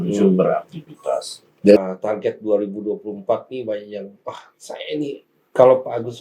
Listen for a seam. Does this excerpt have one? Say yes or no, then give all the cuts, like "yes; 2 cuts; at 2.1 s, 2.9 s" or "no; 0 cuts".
yes; 1 cut; at 1.8 s